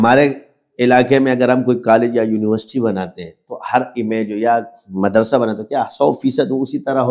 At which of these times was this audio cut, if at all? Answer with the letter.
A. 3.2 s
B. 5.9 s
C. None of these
C